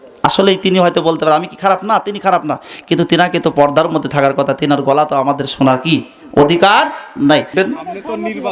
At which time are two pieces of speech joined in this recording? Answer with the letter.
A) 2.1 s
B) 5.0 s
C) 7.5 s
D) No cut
C